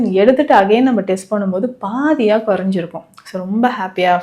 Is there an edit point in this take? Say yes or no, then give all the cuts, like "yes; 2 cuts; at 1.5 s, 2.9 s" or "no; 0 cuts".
no; 0 cuts